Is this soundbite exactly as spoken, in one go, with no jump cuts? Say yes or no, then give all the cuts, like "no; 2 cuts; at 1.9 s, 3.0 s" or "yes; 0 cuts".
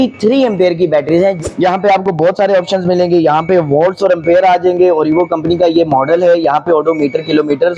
no; 1 cut; at 1.4 s